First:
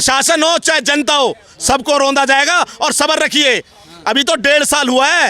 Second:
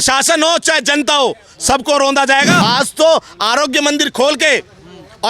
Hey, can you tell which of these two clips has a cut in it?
second; 1 cut; at 2.5 s

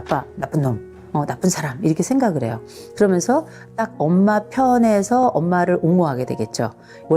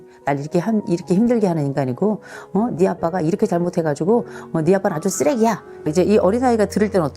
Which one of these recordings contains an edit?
second; 1 cut; at 5.7 s

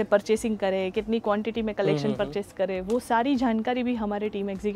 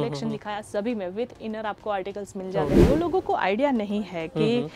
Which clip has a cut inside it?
second; 1 cut; at 2.8 s

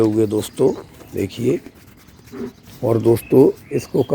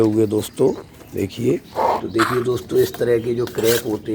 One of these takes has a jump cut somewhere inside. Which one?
second; 1 cut; at 1.7 s

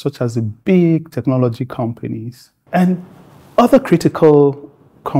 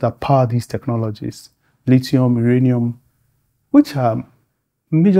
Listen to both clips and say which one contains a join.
first; 1 cut; at 2.6 s

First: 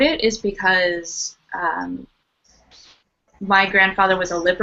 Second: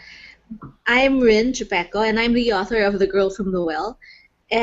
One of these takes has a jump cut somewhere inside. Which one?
second; 1 cut; at 3.1 s

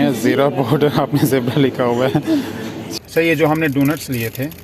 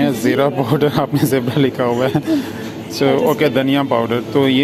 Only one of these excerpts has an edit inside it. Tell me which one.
first; 1 cut; at 2.8 s

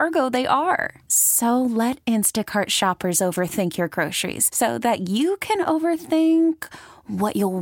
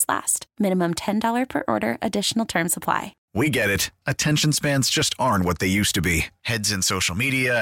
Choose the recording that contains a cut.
second; 1 cut; at 3.2 s

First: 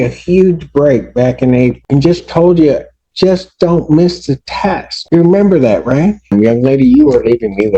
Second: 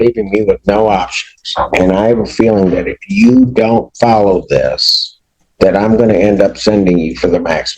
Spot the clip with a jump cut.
first; 3 cuts; at 1.8 s, 4.9 s, 6.3 s

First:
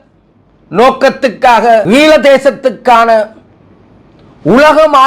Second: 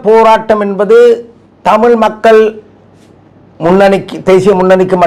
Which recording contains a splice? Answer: first; 1 cut; at 1.8 s

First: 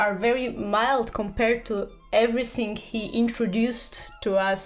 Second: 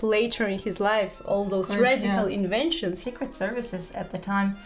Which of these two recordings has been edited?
second; 1 cut; at 3.0 s

